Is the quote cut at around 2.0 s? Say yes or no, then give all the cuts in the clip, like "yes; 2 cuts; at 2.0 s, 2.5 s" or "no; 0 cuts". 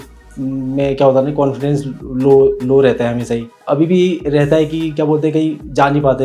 no; 1 cut; at 3.5 s